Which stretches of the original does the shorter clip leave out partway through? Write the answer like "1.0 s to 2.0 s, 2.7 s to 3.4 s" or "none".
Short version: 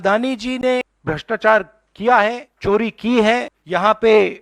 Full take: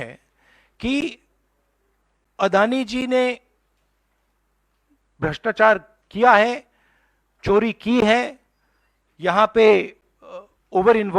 3.4 s to 5.1 s, 6.6 s to 7.3 s, 8.4 s to 9.1 s